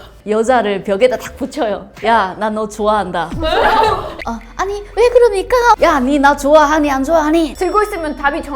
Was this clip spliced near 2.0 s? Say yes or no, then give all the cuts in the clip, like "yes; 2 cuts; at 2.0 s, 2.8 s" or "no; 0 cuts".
no; 2 cuts; at 5.8 s, 7.5 s